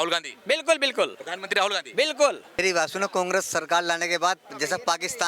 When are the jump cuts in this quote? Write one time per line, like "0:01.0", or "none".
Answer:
0:02.6